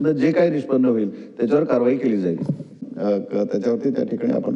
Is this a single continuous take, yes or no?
no